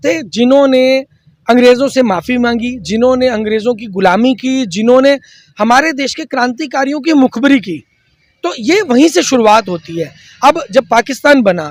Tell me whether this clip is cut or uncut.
uncut